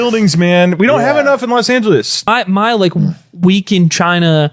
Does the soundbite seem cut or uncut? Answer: cut